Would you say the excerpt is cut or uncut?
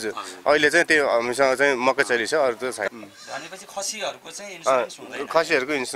cut